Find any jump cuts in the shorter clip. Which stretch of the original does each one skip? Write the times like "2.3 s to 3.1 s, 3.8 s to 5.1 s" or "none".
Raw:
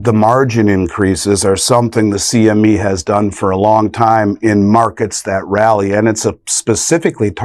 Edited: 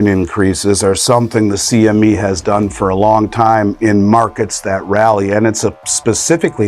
none